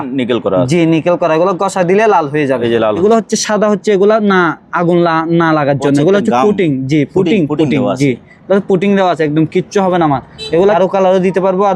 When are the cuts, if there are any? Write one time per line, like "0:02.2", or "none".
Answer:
0:03.0
0:10.7